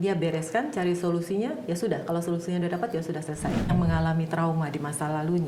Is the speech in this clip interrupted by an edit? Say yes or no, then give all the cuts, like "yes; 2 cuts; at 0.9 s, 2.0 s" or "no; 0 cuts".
yes; 1 cut; at 3.7 s